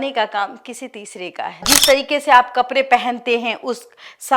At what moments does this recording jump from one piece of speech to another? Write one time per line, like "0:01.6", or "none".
0:01.7